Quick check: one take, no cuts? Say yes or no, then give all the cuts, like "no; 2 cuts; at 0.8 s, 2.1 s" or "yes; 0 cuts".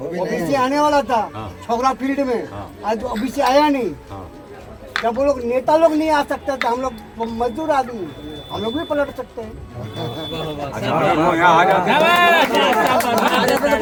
yes; 0 cuts